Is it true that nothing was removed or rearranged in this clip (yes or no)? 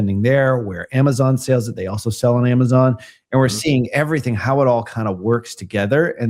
yes